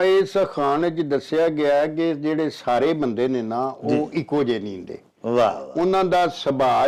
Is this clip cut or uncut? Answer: uncut